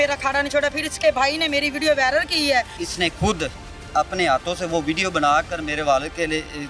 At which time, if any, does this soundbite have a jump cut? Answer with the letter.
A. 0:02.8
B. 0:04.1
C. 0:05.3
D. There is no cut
A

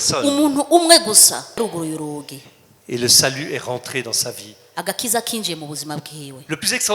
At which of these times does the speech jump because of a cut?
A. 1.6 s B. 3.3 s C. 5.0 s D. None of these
A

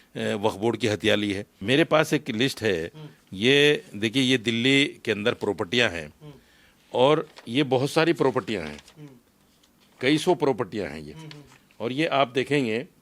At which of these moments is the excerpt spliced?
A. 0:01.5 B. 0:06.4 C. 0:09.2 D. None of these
A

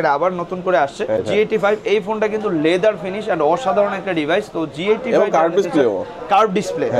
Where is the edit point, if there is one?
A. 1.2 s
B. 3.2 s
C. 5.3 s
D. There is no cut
A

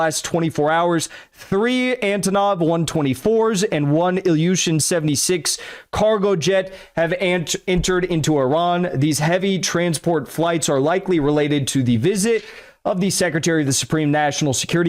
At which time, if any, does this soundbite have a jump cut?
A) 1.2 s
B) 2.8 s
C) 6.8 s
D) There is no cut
D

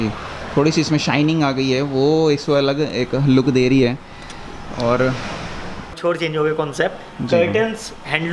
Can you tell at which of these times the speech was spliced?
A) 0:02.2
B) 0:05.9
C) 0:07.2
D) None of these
B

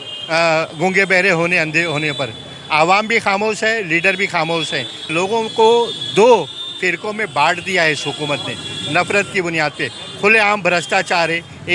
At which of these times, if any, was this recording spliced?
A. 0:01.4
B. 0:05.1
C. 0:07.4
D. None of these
B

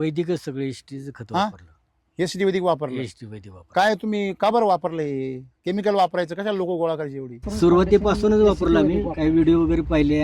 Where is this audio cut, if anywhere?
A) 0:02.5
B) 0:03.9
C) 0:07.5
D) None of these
C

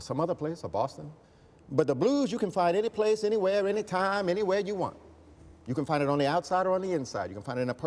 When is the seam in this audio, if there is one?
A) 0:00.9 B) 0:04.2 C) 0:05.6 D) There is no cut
B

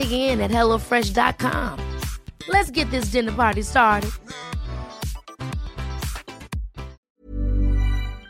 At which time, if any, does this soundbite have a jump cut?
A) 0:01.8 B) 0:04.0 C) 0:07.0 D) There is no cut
C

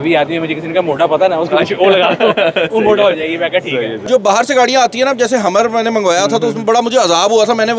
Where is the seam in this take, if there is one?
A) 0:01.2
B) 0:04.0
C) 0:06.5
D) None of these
B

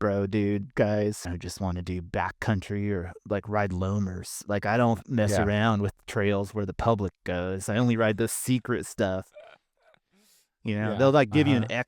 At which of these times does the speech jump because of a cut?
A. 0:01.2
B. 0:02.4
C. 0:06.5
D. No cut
A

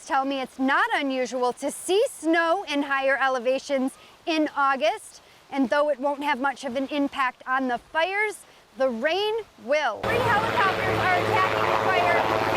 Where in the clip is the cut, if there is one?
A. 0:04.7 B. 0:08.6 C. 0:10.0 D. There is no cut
C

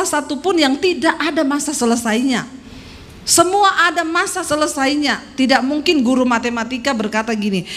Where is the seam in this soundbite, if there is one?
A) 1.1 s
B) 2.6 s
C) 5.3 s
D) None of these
D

